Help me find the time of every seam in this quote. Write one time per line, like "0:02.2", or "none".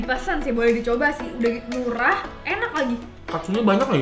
none

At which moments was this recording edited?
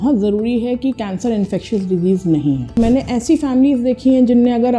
0:02.8

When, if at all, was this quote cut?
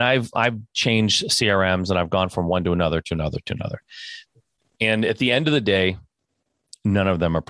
none

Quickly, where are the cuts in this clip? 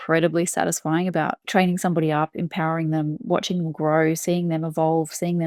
none

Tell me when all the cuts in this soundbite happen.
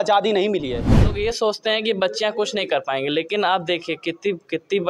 0:01.1

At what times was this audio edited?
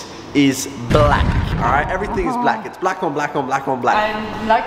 none

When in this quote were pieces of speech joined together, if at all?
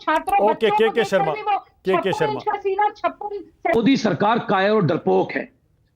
0:03.7

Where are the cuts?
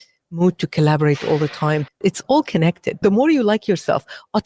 0:01.9
0:03.0

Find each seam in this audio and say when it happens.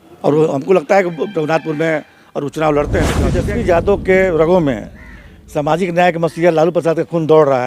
0:03.4

